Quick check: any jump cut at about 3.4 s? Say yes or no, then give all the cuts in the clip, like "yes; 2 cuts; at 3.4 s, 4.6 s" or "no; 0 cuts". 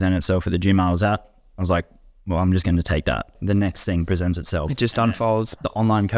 yes; 1 cut; at 3.4 s